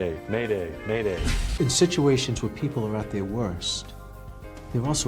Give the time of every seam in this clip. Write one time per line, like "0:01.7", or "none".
0:01.4